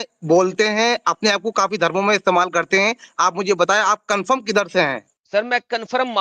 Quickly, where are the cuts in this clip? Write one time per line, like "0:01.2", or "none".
0:05.1